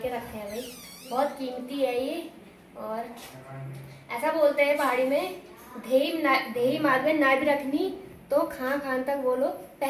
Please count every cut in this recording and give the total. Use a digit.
0